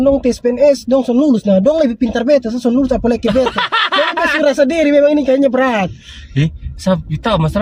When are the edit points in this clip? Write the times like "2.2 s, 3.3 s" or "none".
none